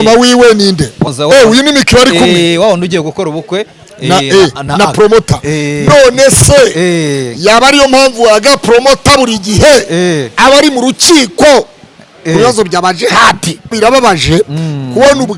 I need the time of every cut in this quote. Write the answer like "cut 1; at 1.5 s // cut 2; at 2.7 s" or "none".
cut 1; at 1.1 s // cut 2; at 13.8 s